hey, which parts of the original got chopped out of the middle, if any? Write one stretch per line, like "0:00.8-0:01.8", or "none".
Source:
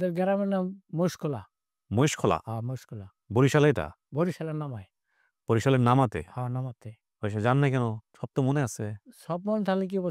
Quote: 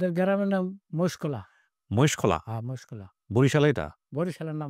none